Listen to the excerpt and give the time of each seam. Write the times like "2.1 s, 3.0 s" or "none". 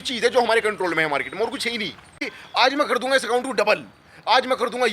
2.3 s